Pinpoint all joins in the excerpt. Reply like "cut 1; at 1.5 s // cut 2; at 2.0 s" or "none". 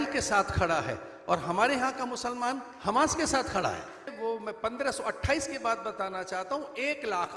cut 1; at 4.1 s